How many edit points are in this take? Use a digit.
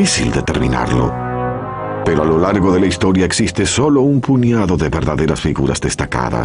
0